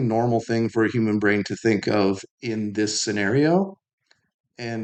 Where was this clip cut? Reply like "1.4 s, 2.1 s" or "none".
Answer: none